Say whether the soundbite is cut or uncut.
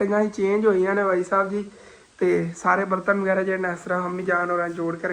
uncut